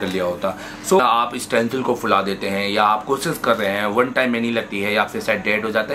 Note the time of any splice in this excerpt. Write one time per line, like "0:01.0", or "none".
0:01.0

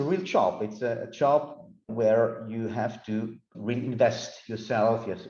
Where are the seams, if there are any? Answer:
none

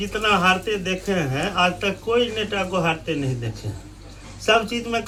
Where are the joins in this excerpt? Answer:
none

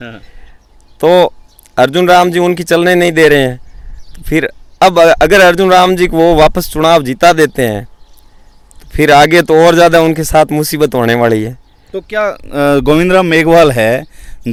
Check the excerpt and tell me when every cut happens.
none

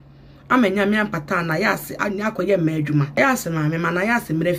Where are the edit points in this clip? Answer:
0:03.1

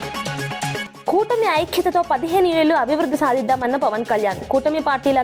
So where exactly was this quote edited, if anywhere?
0:00.9

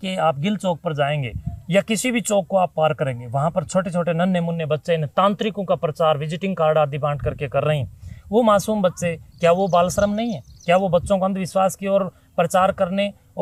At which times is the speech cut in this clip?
none

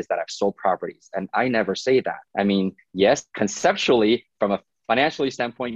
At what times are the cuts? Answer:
0:02.2
0:03.3

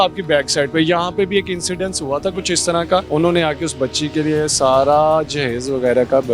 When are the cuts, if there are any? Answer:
0:03.1

